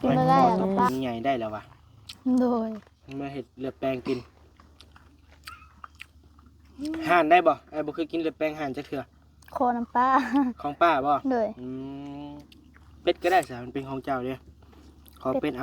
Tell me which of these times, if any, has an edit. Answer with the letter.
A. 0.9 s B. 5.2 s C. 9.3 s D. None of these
A